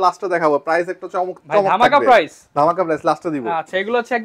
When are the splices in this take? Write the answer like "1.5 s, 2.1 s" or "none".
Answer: none